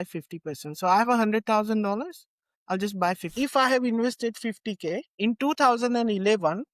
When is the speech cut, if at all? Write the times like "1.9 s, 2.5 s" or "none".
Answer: 3.3 s, 5.1 s